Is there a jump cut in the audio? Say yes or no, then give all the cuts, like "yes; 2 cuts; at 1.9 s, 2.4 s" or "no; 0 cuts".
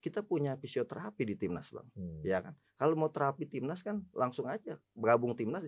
no; 0 cuts